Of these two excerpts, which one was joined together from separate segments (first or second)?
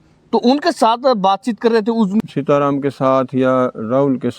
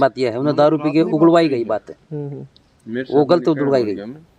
first